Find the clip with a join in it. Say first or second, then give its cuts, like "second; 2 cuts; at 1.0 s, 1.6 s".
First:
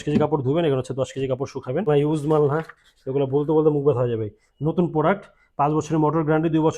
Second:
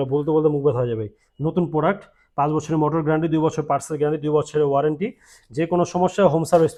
first; 1 cut; at 1.9 s